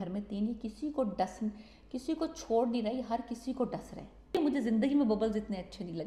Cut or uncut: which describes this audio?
cut